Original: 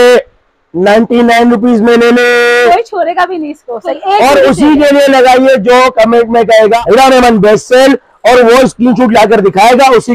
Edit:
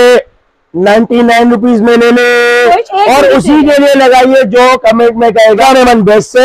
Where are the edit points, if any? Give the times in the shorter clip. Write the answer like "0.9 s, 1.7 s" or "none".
2.9 s, 5.6 s

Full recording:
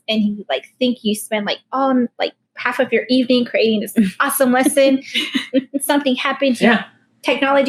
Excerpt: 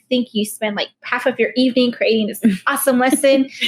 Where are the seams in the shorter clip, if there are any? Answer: 0.9 s

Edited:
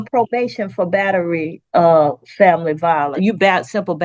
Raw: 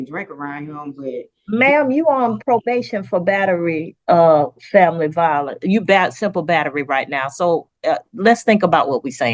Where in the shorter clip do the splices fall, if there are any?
3.1 s

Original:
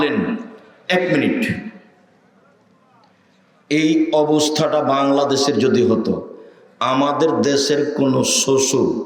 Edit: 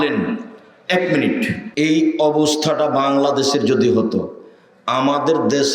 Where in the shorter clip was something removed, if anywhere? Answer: 1.6 s

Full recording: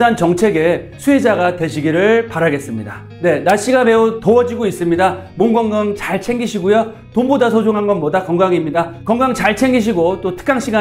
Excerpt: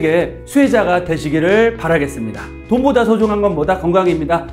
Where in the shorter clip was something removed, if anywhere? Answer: 2.5 s

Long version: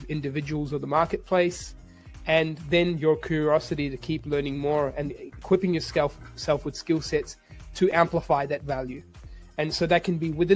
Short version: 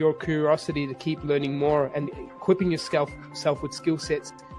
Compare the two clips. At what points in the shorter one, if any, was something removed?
none

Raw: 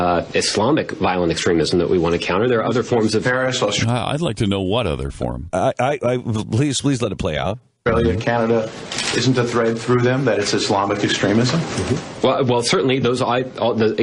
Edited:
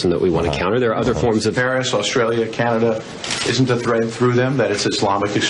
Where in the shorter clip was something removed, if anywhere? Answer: 2.1 s

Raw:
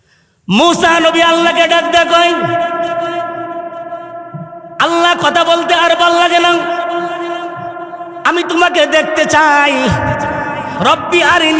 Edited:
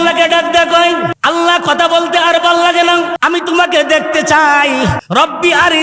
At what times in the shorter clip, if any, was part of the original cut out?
1.1 s, 3.1 s, 5.0 s

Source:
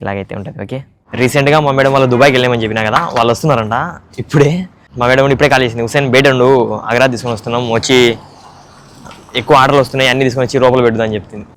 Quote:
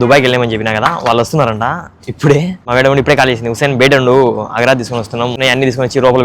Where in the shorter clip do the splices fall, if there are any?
2.6 s, 5.3 s

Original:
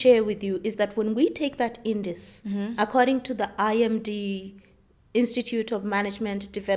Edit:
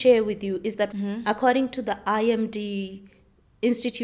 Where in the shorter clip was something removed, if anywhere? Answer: 0.9 s

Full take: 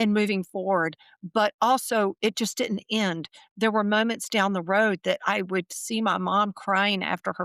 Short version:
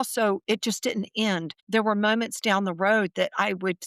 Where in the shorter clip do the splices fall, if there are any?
1.5 s

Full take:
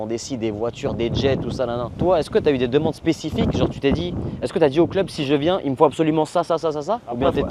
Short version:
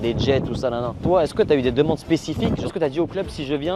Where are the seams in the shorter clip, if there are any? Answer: 2.6 s

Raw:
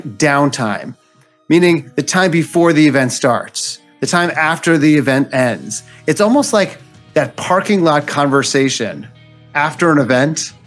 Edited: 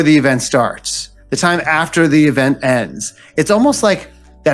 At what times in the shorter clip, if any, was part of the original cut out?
none

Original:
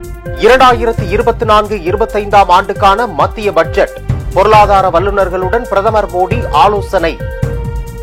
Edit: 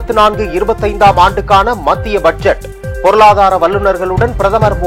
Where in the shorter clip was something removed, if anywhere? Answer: none

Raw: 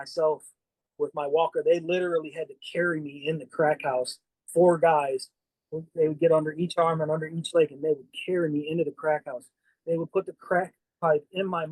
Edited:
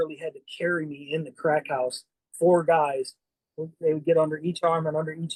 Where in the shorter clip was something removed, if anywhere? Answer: none

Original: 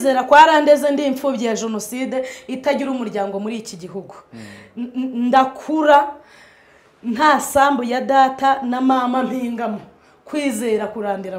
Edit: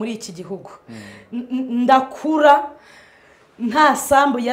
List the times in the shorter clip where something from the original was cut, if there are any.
none

